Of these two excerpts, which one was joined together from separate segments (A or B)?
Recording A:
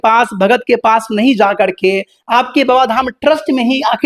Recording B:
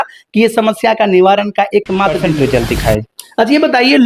B